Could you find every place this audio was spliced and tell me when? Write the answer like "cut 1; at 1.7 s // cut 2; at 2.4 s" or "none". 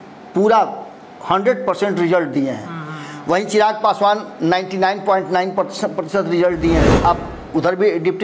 cut 1; at 6.9 s